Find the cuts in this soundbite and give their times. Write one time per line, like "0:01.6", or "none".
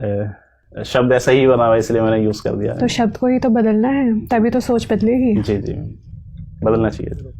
none